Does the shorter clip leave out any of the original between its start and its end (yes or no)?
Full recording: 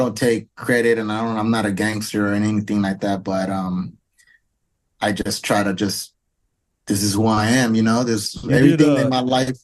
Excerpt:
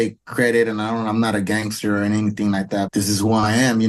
yes